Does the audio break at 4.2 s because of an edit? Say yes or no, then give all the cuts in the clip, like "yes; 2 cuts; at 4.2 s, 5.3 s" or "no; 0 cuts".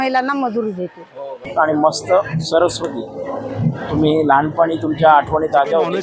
no; 1 cut; at 1.5 s